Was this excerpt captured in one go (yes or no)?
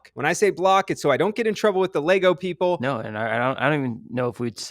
no